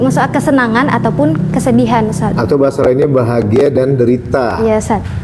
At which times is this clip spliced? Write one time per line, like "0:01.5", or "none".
none